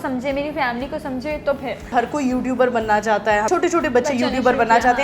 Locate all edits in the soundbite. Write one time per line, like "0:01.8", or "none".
0:01.9
0:03.5